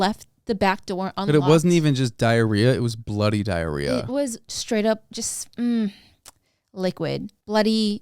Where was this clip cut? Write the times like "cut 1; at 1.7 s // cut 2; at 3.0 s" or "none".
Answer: cut 1; at 5.1 s